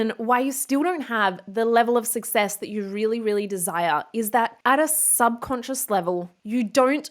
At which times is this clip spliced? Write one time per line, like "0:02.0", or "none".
0:04.6